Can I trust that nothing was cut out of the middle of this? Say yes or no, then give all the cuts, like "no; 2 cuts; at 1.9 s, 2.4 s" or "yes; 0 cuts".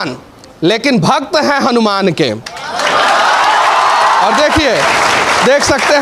yes; 0 cuts